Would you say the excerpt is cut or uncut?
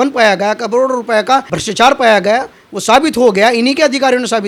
uncut